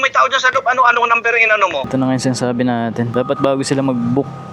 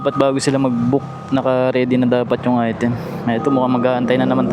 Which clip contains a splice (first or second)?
first